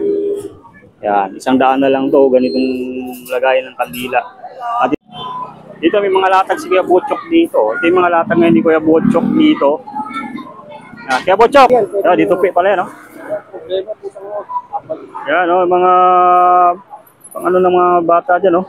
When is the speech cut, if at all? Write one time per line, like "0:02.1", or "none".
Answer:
0:04.9
0:11.7

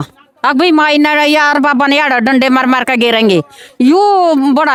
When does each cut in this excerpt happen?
none

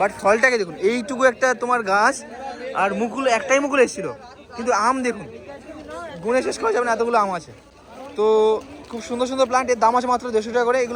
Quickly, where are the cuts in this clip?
none

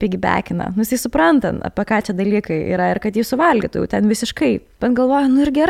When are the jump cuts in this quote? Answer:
0:04.7

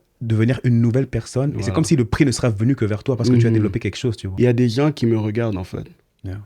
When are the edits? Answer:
0:04.2

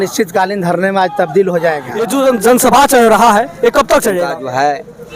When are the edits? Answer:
0:02.1
0:04.3

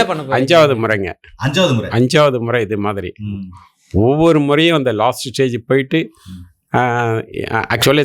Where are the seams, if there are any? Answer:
none

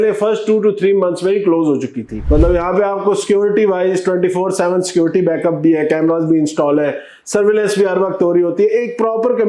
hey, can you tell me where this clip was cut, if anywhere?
0:02.1

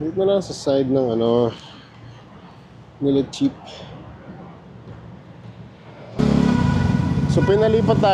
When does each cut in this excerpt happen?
0:06.2

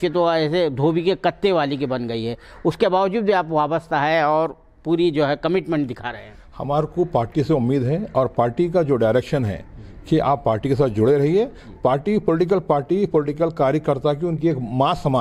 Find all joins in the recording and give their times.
none

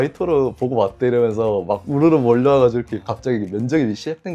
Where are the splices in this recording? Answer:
none

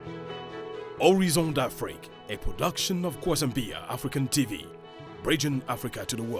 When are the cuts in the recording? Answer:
0:01.0

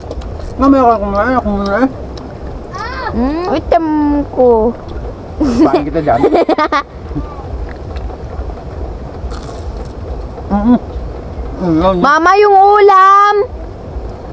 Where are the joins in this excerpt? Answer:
0:03.5

